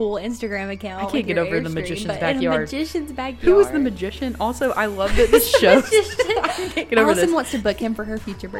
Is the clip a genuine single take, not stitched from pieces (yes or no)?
yes